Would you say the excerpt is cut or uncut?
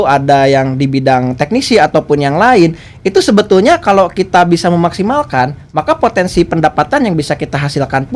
uncut